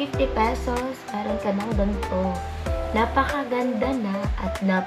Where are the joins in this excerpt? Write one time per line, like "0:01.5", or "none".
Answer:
none